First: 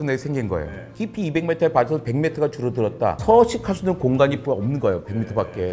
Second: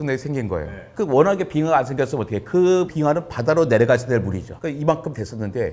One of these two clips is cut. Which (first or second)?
first